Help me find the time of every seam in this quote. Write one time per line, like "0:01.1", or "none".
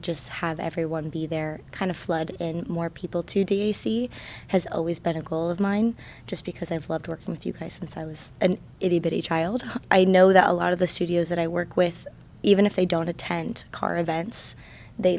0:01.6
0:09.8